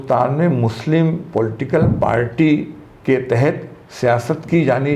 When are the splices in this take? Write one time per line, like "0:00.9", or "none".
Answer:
none